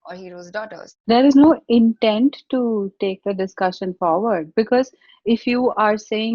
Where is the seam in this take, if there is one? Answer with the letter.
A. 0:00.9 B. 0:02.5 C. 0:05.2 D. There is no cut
A